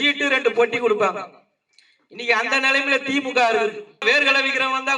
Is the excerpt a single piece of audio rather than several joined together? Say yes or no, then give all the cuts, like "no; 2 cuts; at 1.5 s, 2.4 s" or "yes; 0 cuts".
no; 1 cut; at 4.0 s